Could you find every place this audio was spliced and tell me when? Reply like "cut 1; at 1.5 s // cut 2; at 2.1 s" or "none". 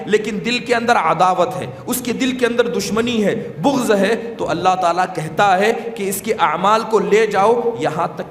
none